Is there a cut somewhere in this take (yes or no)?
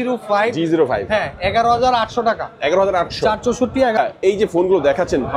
yes